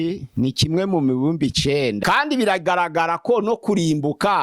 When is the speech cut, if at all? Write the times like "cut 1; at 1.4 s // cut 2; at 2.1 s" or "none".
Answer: cut 1; at 2.0 s